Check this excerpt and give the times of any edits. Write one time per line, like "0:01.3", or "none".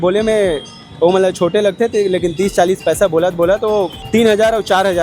0:04.0